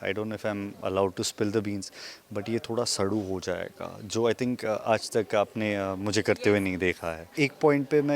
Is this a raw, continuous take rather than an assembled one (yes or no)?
no